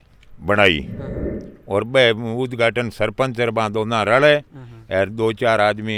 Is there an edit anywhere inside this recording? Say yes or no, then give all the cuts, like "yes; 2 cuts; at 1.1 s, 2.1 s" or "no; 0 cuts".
no; 0 cuts